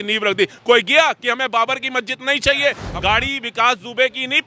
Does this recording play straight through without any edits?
no; 1 cut; at 2.9 s

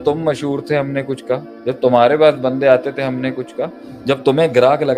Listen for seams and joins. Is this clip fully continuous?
no; 2 cuts; at 1.5 s, 3.9 s

